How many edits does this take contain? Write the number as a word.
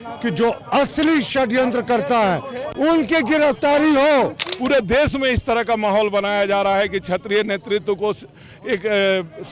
one